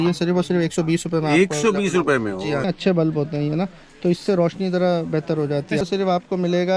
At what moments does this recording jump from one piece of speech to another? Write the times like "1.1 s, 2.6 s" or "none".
2.6 s, 5.8 s

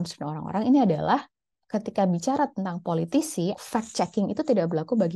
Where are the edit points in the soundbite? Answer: 3.6 s

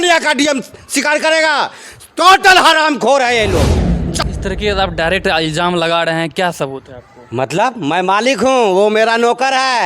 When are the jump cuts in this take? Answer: 4.1 s

